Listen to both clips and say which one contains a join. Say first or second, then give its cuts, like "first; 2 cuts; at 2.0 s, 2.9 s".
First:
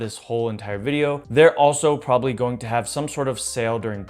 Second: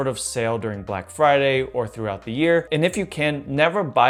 first; 1 cut; at 1.2 s